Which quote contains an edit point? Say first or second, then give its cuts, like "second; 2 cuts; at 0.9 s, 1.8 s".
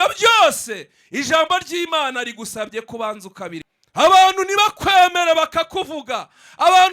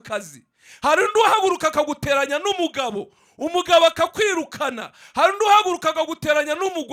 first; 1 cut; at 3.8 s